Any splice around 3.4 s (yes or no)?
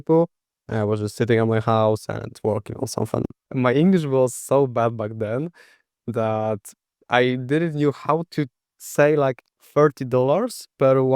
yes